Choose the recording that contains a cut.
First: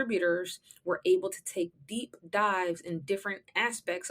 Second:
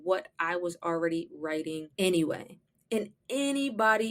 second; 1 cut; at 1.9 s

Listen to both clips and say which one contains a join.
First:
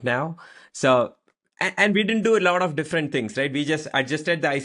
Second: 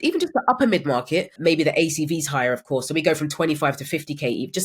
second; 1 cut; at 1.3 s

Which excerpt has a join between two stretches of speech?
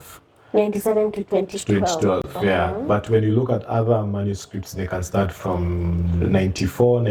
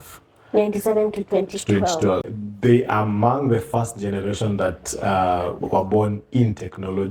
second; 1 cut; at 2.3 s

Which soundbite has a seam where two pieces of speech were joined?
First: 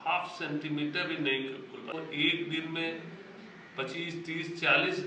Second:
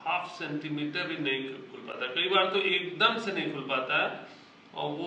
first; 1 cut; at 1.9 s

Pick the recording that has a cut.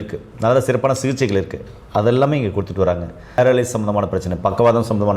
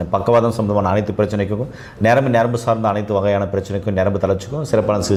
first; 1 cut; at 3.4 s

